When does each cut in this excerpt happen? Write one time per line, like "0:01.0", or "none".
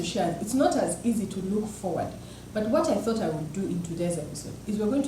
none